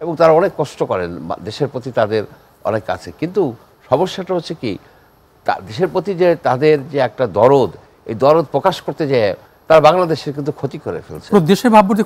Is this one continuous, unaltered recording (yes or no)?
yes